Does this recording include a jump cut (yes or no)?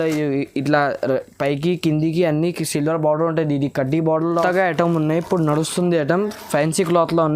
yes